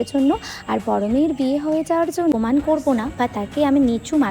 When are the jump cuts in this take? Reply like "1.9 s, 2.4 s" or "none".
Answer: 2.3 s